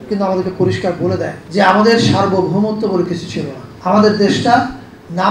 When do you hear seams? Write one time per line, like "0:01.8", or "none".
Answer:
0:01.4
0:03.6

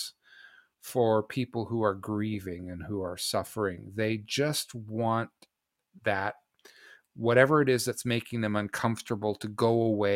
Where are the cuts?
none

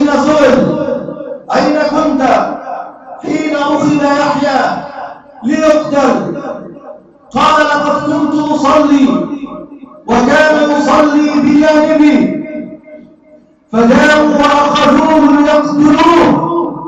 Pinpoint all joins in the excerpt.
none

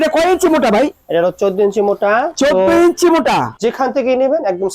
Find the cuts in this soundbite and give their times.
0:03.5

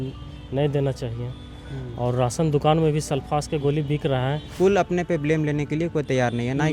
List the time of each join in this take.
0:04.4

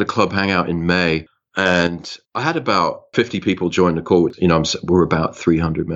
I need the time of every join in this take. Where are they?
0:03.1
0:04.3

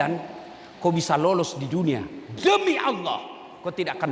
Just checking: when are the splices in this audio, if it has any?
none

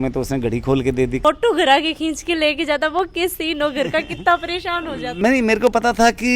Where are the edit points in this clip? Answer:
0:01.2
0:05.0

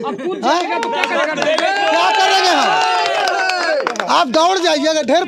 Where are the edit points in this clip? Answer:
none

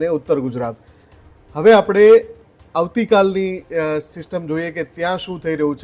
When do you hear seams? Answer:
none

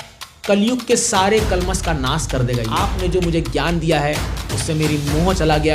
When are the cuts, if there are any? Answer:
0:02.9

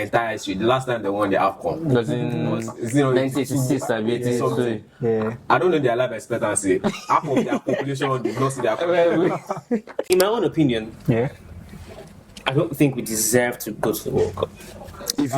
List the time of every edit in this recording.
0:10.1

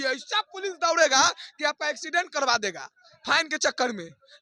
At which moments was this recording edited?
none

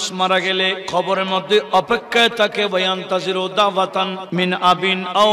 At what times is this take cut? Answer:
0:00.8
0:04.2

